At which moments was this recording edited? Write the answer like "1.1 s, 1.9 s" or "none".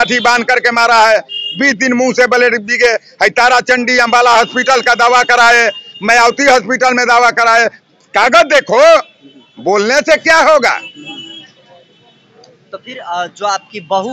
none